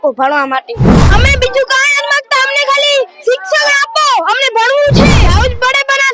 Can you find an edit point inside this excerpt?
yes; 2 cuts; at 1.0 s, 5.2 s

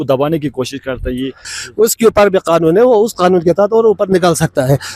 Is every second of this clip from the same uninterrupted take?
no; 1 cut; at 1.4 s

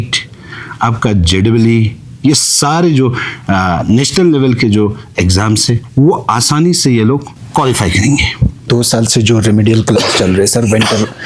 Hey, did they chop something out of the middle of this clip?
yes; 1 cut; at 8.7 s

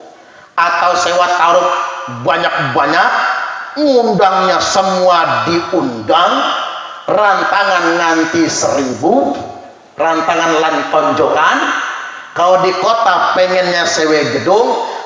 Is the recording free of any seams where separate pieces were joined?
yes; 0 cuts

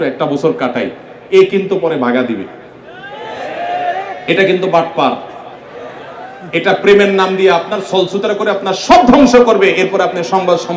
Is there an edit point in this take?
no; 0 cuts

